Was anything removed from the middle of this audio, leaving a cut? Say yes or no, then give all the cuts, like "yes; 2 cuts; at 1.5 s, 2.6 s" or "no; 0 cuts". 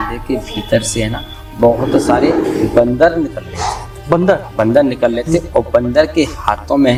no; 0 cuts